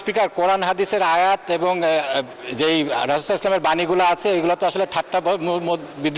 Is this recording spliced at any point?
no; 0 cuts

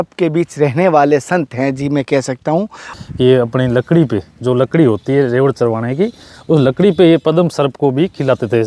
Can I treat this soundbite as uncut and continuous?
no; 1 cut; at 2.8 s

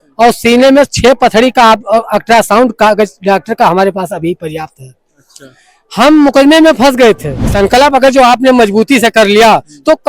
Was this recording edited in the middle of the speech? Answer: yes; 1 cut; at 7.5 s

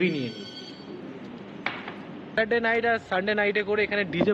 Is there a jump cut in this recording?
yes; 1 cut; at 2.3 s

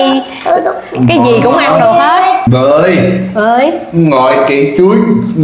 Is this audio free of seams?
no; 1 cut; at 2.4 s

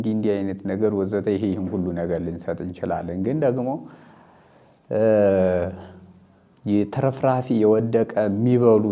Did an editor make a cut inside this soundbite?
no; 0 cuts

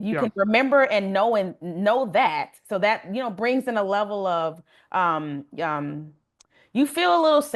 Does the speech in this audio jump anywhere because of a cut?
no; 0 cuts

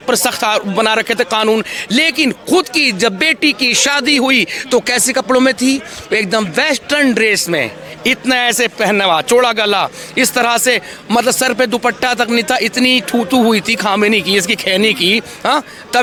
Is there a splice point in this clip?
no; 0 cuts

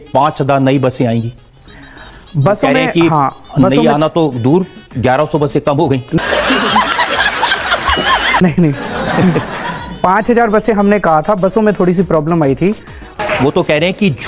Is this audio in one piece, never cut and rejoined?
yes; 0 cuts

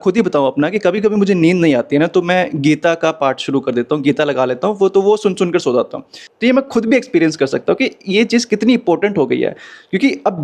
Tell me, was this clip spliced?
no; 0 cuts

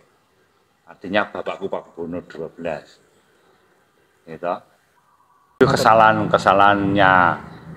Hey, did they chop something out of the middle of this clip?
yes; 1 cut; at 5.6 s

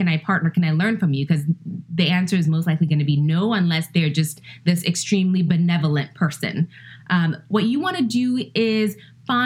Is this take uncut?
yes; 0 cuts

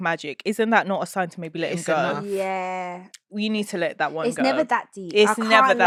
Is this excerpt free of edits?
yes; 0 cuts

